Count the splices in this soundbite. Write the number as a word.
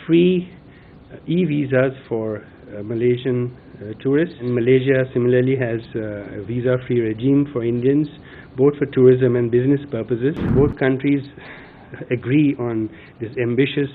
two